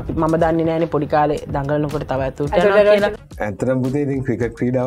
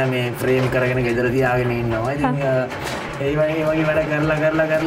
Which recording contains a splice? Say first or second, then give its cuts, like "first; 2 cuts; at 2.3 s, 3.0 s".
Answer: first; 1 cut; at 3.2 s